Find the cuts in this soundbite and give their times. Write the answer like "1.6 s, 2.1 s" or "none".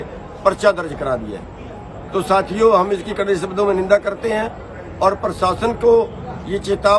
none